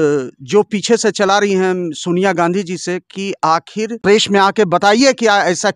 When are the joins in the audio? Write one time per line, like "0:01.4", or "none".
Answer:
0:03.9